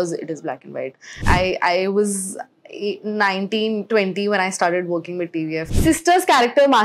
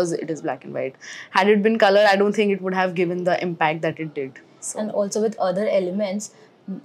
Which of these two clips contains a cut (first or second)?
first